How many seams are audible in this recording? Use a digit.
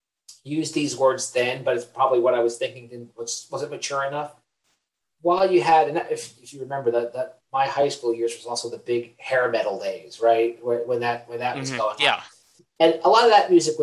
0